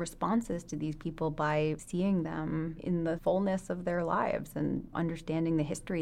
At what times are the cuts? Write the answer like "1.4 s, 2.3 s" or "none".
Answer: 1.8 s, 3.1 s, 4.9 s